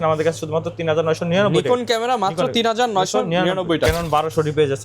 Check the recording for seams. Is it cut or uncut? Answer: cut